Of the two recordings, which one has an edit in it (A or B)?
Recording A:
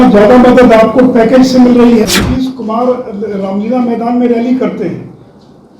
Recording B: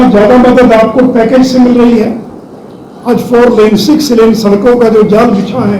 A